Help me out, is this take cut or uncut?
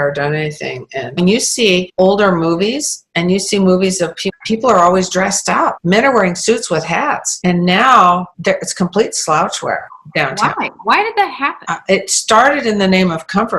uncut